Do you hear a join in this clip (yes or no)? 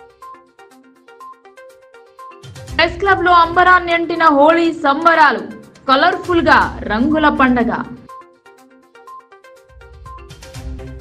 no